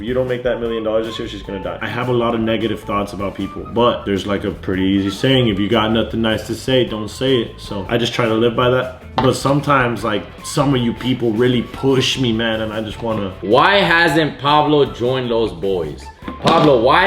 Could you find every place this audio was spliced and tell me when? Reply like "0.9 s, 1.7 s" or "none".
1.8 s, 13.4 s